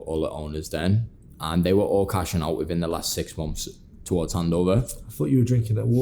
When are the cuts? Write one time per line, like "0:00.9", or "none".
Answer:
none